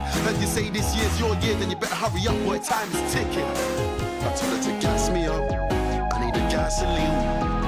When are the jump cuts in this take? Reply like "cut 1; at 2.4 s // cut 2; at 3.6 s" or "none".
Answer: none

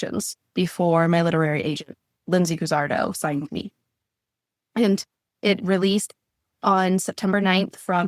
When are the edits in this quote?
cut 1; at 5.4 s

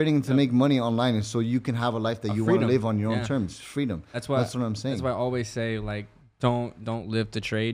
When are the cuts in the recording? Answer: none

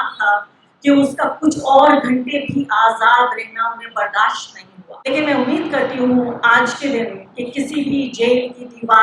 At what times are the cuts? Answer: cut 1; at 5.1 s

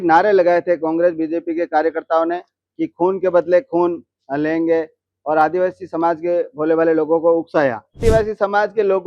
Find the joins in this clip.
cut 1; at 8.0 s

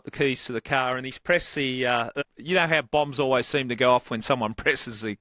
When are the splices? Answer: cut 1; at 2.1 s

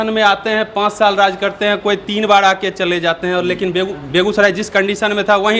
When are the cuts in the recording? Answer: none

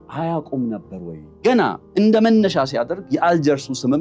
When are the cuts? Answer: cut 1; at 1.4 s

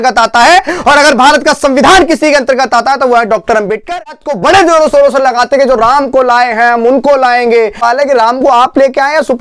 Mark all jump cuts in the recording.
cut 1; at 4.2 s // cut 2; at 7.8 s

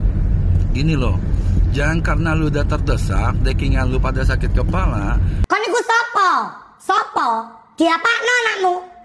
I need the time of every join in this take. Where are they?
cut 1; at 5.4 s

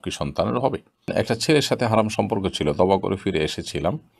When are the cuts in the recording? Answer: cut 1; at 1.1 s

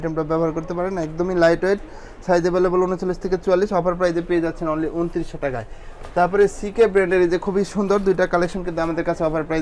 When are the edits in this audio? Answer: none

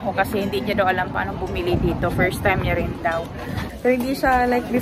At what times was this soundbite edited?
cut 1; at 3.5 s

